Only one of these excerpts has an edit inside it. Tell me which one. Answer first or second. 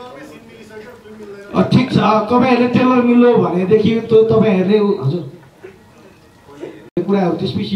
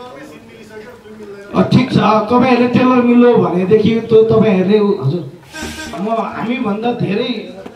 second